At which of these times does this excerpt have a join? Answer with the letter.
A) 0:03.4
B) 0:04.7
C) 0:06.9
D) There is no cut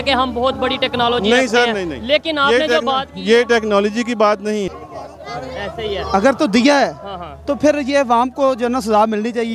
B